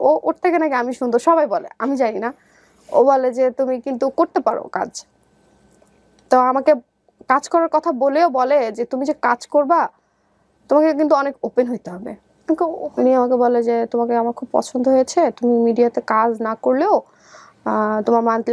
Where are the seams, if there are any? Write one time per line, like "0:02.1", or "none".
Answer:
0:12.4